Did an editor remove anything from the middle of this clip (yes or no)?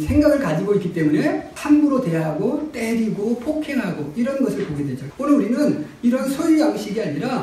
yes